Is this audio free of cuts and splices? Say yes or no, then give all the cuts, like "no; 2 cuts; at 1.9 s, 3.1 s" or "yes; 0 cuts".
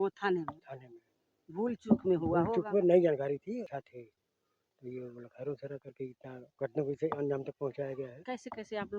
no; 1 cut; at 3.7 s